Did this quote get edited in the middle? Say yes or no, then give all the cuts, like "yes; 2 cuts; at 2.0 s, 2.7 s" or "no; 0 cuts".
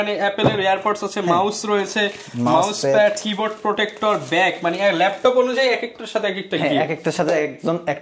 no; 0 cuts